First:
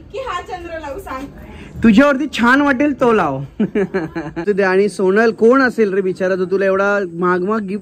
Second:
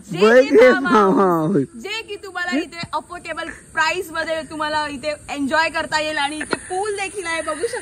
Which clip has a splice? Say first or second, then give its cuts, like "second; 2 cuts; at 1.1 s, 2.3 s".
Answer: first; 1 cut; at 4.3 s